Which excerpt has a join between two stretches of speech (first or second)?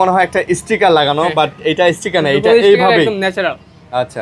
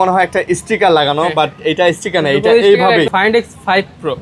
second